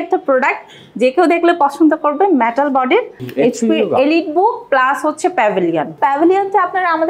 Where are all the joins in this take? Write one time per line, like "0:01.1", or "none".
0:03.2
0:06.0